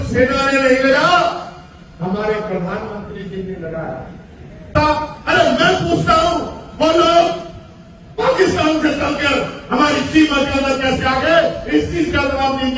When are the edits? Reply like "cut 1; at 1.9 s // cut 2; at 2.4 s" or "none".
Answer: cut 1; at 4.7 s